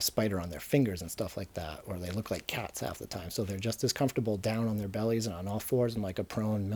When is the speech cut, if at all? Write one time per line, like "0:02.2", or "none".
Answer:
none